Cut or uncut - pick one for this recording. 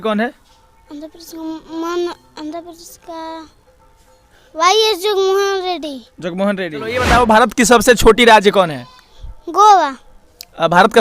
cut